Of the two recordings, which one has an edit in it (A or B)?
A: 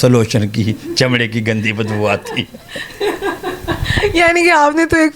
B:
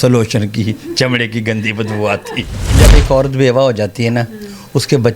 B